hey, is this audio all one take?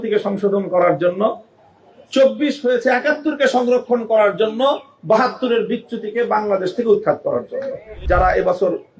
no; 1 cut; at 8.0 s

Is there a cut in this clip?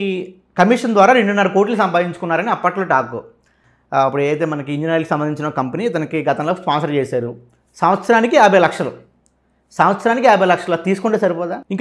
no; 0 cuts

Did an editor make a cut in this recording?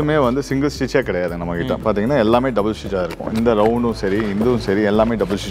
no; 0 cuts

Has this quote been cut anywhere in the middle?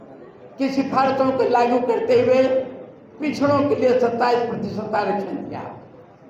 no; 0 cuts

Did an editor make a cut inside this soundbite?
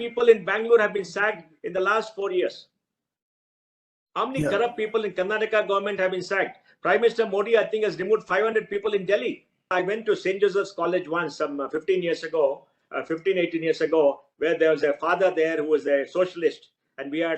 yes; 1 cut; at 9.5 s

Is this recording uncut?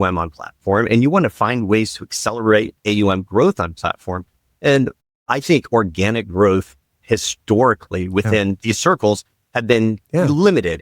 no; 1 cut; at 8.6 s

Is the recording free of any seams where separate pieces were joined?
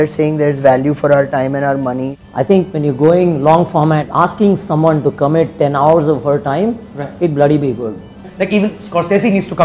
no; 3 cuts; at 2.2 s, 4.1 s, 8.2 s

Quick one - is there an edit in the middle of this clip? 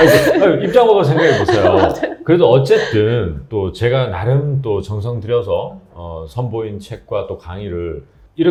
no; 0 cuts

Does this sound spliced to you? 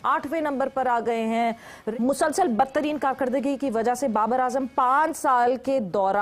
yes; 1 cut; at 1.8 s

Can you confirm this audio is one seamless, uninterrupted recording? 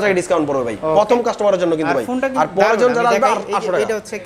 yes; 0 cuts

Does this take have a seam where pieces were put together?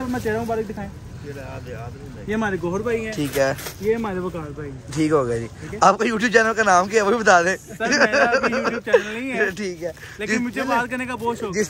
yes; 1 cut; at 7.7 s

